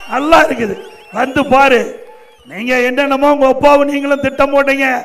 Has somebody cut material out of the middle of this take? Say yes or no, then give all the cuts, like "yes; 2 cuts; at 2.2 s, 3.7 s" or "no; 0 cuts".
no; 0 cuts